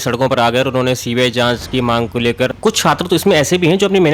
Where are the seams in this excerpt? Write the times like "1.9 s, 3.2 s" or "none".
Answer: 2.5 s